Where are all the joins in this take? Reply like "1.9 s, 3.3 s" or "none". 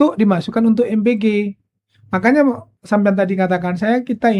2.7 s